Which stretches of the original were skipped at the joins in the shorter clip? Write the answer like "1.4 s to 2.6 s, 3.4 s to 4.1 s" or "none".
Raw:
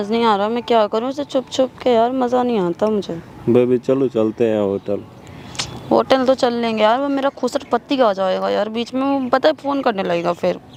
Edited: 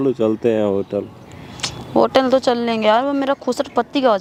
none

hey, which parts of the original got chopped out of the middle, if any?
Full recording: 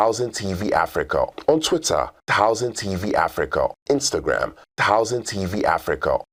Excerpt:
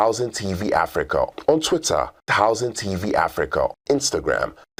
none

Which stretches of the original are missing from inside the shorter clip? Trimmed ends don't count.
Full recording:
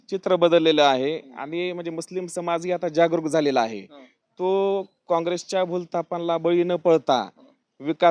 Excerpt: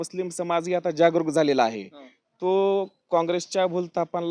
none

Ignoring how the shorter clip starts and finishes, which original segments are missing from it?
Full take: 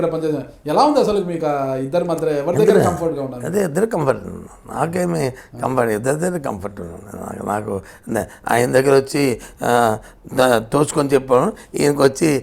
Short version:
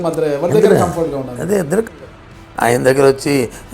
3.9 s to 7.8 s

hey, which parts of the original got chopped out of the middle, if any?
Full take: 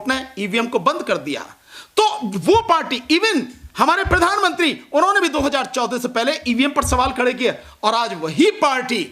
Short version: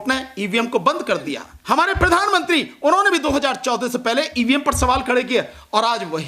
1.5 s to 3.6 s

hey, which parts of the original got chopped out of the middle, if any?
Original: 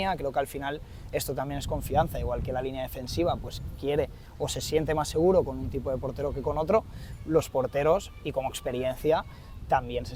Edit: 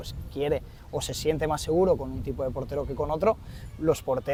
none

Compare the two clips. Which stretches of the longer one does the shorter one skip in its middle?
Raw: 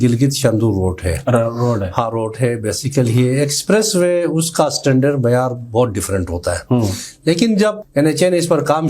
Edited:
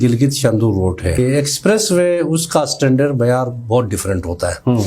1.2 s to 3.2 s

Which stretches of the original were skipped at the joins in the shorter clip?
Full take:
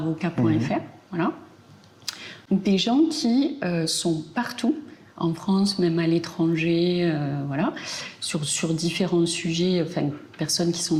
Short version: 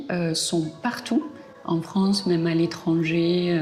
none

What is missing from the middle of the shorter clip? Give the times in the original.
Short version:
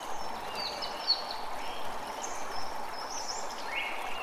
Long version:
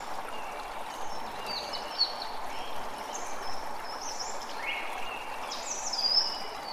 none

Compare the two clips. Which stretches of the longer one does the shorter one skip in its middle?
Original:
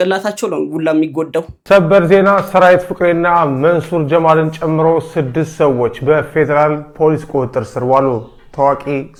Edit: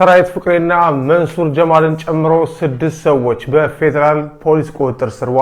none

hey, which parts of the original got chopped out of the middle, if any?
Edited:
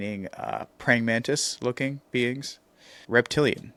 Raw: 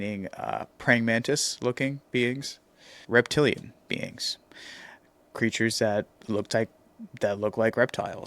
none

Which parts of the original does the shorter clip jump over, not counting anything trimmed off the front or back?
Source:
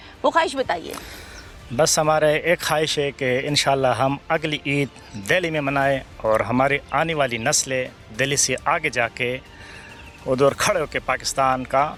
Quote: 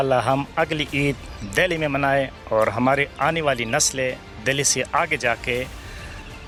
none

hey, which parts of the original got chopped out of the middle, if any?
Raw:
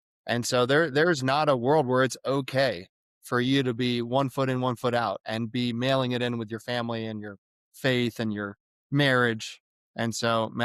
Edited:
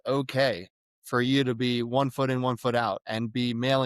none

